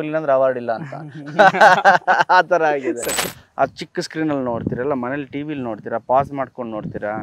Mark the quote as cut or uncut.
cut